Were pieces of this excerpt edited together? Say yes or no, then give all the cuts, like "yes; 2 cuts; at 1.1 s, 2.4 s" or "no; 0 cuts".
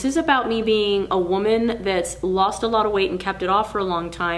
no; 0 cuts